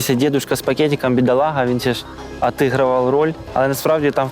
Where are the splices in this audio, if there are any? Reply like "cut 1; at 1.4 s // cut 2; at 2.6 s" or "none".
cut 1; at 3.4 s